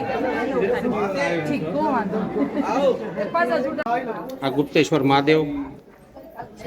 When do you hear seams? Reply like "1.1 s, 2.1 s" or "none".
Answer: 3.8 s